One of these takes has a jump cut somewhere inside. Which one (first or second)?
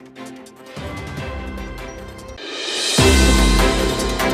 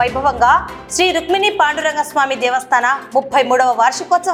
first